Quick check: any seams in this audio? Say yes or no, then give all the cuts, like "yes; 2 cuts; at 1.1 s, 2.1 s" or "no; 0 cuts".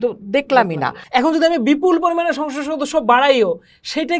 yes; 1 cut; at 0.9 s